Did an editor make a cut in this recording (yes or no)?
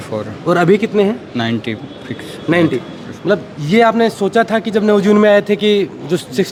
no